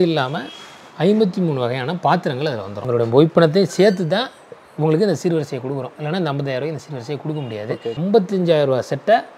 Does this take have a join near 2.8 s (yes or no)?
yes